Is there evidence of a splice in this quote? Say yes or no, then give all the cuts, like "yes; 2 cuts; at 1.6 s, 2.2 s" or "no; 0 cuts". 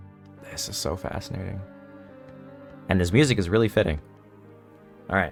no; 0 cuts